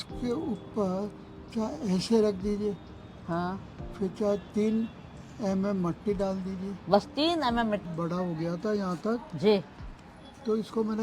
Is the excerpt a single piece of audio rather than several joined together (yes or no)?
no